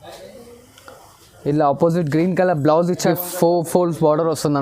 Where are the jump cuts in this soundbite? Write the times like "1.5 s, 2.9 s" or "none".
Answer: 3.1 s